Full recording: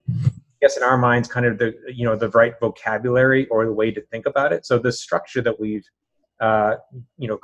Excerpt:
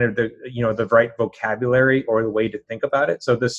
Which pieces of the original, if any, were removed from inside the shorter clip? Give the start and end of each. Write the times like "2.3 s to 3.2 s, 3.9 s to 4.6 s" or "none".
none